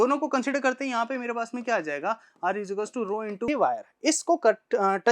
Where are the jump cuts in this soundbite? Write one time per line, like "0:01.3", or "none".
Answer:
0:03.5